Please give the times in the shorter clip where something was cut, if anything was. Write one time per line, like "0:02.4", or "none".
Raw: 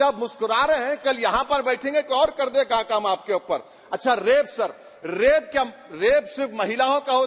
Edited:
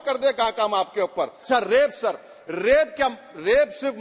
0:01.4

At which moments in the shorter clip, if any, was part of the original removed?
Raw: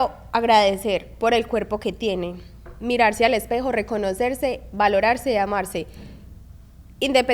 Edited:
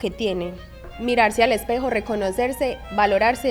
none

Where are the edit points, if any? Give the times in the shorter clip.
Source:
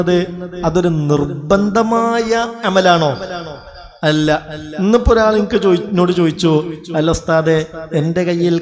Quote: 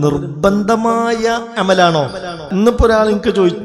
0:02.3

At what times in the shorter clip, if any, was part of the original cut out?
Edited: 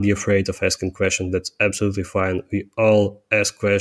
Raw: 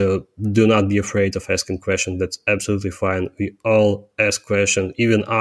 none

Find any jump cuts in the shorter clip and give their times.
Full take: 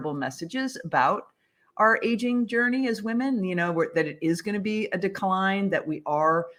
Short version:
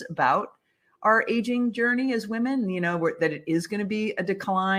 none

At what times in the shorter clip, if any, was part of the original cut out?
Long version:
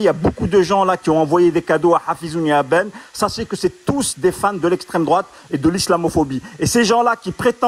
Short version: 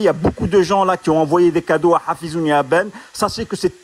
none

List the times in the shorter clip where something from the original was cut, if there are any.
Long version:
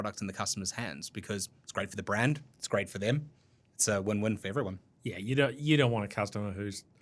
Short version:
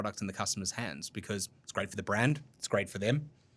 none

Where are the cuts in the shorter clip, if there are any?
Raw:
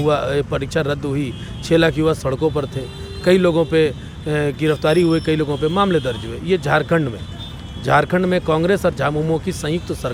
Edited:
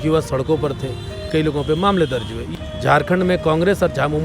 0:01.3
0:02.4

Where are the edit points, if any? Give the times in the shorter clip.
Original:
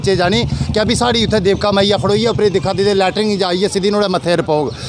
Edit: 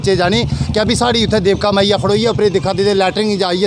none

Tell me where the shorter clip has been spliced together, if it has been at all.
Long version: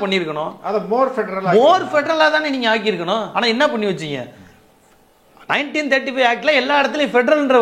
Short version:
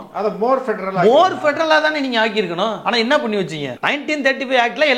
0:03.7

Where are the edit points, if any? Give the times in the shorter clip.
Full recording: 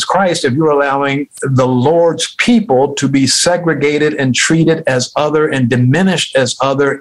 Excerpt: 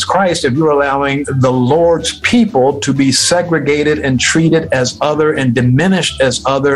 0:01.3

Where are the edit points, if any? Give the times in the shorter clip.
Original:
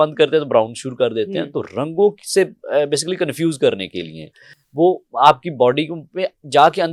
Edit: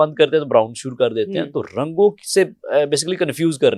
none

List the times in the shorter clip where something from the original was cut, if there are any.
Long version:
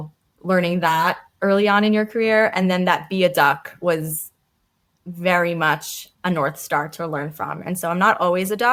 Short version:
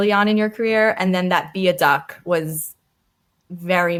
none

